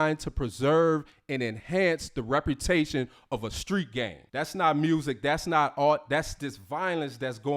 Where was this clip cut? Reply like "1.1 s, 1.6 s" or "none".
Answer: 4.2 s